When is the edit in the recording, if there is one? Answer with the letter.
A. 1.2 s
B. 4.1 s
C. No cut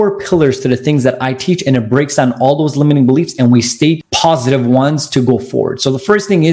B